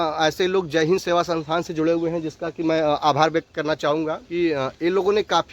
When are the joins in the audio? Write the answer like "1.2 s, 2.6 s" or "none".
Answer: 4.2 s

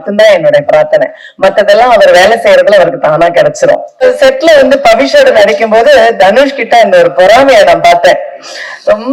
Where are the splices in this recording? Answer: 4.0 s

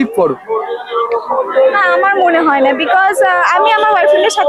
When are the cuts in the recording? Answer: none

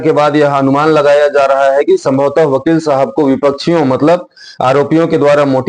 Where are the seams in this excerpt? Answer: none

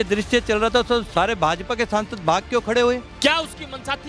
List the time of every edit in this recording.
3.1 s

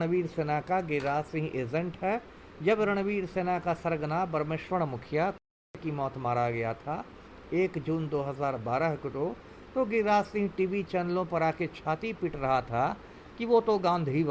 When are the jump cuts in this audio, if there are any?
none

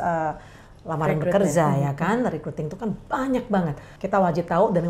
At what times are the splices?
3.9 s

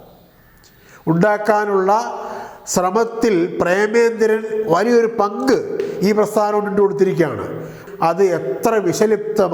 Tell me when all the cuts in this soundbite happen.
7.8 s

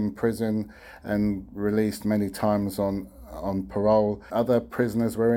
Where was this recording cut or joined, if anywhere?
4.3 s

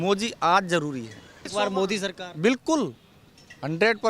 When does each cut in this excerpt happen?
1.5 s

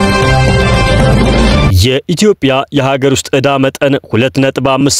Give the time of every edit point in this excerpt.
1.7 s

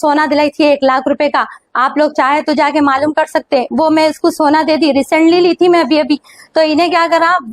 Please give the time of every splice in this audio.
none

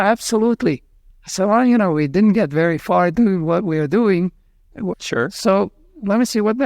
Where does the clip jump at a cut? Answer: 3.1 s, 5.0 s

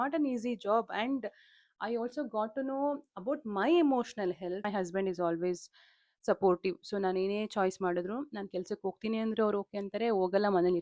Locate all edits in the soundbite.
4.7 s

